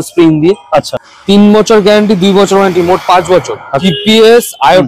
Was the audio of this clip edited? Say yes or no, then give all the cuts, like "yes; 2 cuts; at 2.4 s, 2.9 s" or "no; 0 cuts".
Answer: yes; 2 cuts; at 1.0 s, 3.8 s